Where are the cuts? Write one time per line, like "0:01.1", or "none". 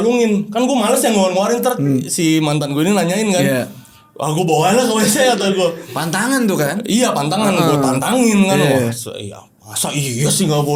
none